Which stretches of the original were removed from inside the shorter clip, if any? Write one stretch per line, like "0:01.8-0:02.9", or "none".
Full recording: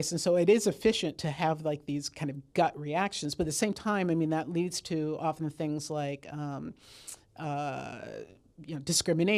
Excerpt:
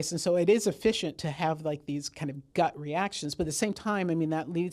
none